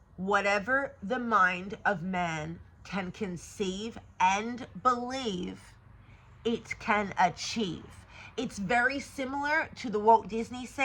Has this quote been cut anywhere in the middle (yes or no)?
no